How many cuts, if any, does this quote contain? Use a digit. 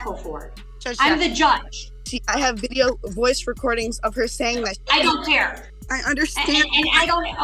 2